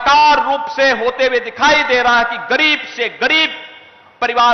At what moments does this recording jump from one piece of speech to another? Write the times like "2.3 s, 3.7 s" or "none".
none